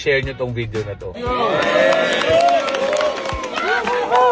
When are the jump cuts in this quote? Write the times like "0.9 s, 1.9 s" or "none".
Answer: 1.1 s